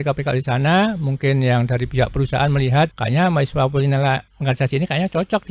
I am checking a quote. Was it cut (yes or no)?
yes